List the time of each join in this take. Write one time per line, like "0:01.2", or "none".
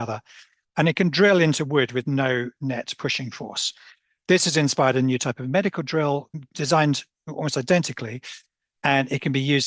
0:06.3